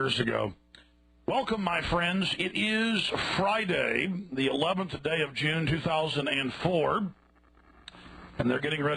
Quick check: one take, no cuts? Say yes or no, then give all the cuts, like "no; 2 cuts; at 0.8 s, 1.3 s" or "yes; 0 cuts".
no; 1 cut; at 1.7 s